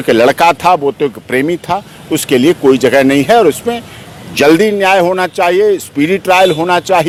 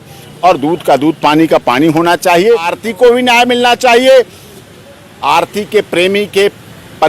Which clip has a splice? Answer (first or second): second